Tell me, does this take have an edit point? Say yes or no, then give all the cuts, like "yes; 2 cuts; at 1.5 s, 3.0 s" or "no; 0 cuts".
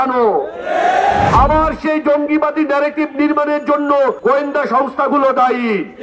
yes; 2 cuts; at 1.3 s, 4.2 s